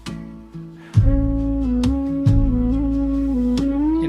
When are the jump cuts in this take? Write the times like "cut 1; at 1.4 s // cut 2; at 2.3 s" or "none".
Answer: none